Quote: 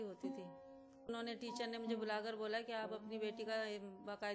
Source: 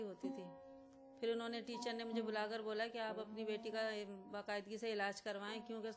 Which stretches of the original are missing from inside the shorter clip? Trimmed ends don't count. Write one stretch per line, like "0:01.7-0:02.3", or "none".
0:01.1-0:01.4